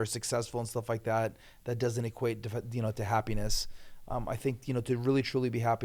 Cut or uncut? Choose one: uncut